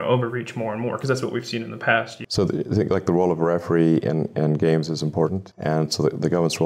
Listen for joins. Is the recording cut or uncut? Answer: cut